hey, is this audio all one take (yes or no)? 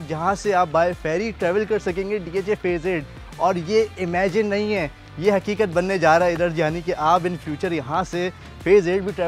yes